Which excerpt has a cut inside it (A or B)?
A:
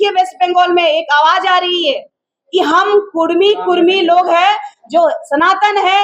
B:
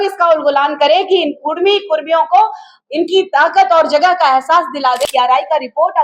B